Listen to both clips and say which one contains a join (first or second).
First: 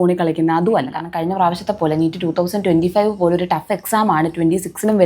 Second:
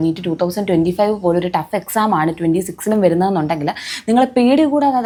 first